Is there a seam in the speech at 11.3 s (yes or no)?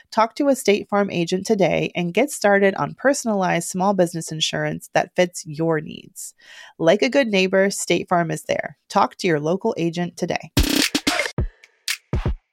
yes